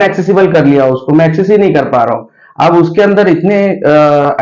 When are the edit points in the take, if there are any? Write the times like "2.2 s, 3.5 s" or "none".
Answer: none